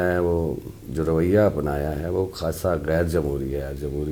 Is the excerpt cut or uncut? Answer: uncut